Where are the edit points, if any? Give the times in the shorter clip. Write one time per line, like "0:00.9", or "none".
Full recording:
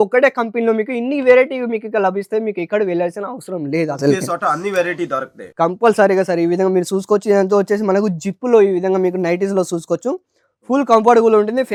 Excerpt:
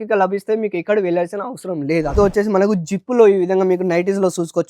0:02.1